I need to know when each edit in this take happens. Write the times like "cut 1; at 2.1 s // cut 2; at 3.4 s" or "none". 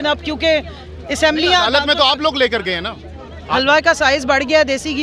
cut 1; at 3.5 s